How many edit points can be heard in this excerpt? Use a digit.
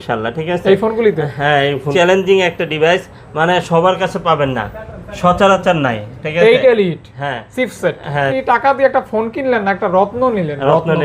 2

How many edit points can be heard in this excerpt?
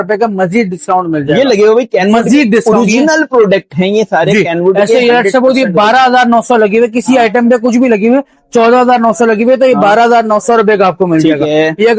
0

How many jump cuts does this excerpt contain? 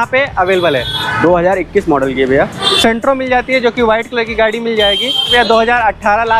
3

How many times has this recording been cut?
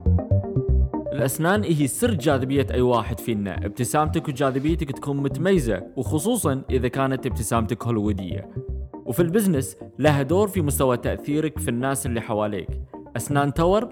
1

